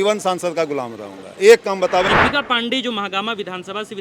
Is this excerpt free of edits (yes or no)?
no